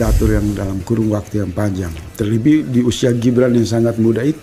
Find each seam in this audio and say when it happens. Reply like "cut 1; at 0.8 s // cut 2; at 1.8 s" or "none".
none